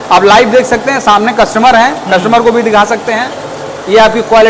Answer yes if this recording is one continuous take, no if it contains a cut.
yes